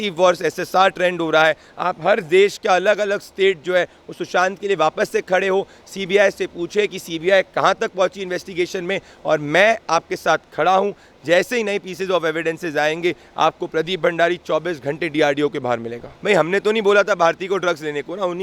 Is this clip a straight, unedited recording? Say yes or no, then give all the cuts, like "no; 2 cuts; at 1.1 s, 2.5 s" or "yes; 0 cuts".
no; 1 cut; at 16.1 s